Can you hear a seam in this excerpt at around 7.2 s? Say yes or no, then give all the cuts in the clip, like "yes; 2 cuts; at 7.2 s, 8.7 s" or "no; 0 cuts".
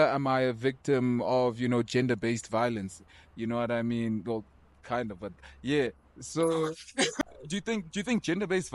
yes; 1 cut; at 7.2 s